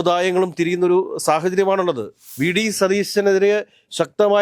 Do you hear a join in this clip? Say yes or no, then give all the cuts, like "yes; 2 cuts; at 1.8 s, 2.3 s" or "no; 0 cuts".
yes; 1 cut; at 2.3 s